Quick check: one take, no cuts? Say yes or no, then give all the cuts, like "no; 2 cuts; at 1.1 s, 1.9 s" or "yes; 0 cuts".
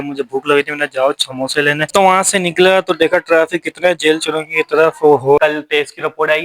no; 2 cuts; at 1.9 s, 5.4 s